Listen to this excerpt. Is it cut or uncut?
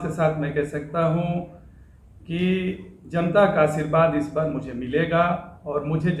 uncut